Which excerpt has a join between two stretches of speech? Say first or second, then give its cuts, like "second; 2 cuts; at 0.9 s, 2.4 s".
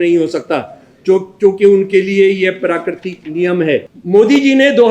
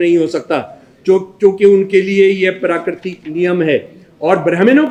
first; 1 cut; at 3.9 s